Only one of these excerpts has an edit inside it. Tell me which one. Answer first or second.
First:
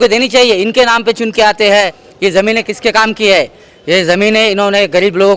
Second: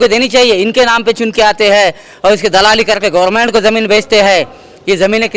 first